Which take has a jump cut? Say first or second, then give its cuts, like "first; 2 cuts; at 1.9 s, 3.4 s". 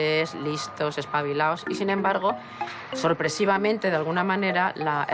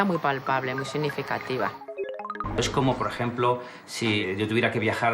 second; 2 cuts; at 2.1 s, 4.2 s